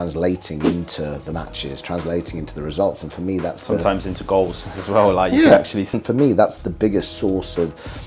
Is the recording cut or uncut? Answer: uncut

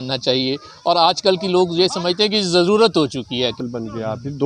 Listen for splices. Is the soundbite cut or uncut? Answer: cut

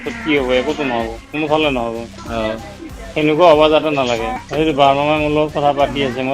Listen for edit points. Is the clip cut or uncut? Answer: cut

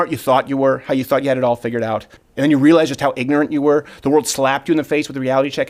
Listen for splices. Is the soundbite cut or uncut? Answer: cut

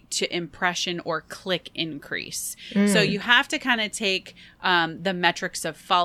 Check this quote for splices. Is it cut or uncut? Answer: uncut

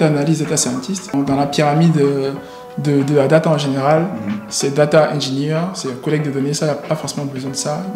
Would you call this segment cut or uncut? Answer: cut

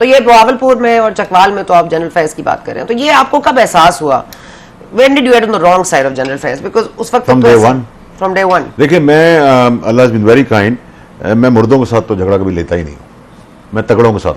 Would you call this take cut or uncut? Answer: uncut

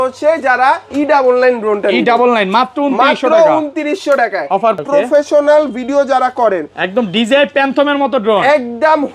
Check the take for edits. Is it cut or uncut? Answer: cut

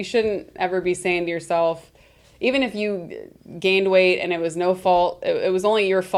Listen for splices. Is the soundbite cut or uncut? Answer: uncut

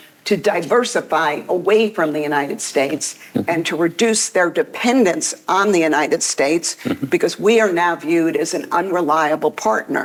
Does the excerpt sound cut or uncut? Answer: uncut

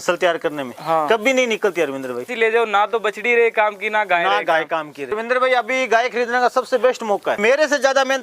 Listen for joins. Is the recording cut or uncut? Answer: cut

